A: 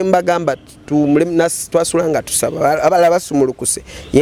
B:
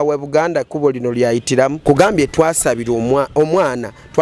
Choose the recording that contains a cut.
B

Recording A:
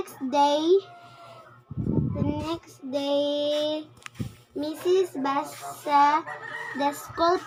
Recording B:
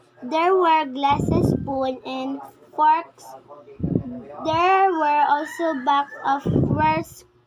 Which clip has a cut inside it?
B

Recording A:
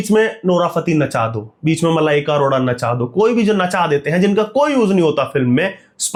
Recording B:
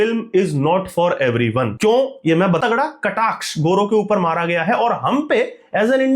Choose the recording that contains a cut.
B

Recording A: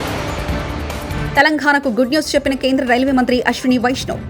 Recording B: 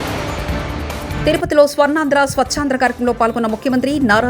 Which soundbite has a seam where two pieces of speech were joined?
B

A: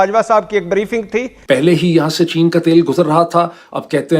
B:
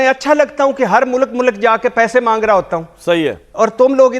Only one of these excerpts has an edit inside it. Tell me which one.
A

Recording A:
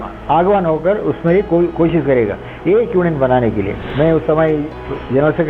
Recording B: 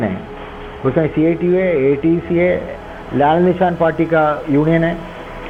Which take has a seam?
A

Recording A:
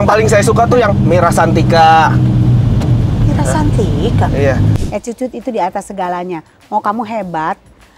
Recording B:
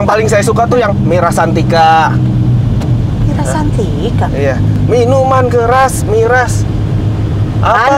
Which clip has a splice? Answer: A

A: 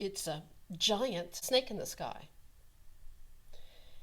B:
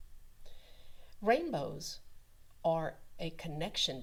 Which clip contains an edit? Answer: A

